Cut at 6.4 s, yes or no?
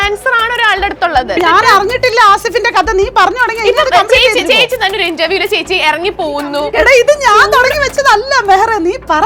yes